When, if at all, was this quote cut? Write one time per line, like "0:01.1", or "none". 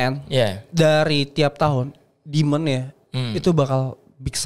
none